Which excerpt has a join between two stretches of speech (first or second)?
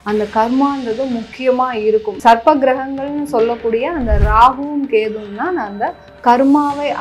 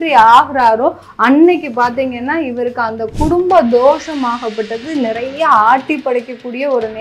first